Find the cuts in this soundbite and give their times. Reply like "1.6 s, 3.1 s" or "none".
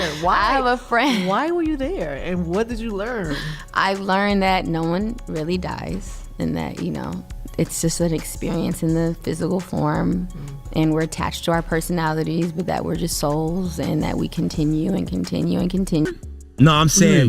16.3 s